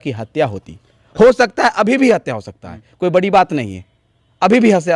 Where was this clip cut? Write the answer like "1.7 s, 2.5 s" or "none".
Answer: none